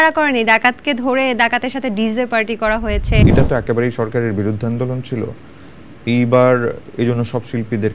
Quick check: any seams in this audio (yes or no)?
yes